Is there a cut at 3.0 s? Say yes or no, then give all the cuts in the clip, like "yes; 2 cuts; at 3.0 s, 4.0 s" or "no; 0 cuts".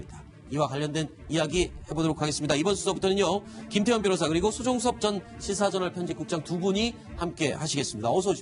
no; 1 cut; at 6.8 s